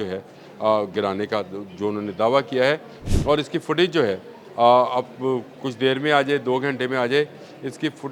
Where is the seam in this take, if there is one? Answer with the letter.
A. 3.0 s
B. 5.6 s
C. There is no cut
A